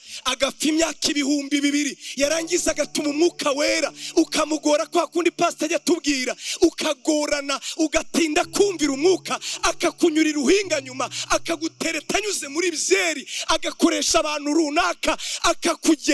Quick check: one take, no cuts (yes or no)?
yes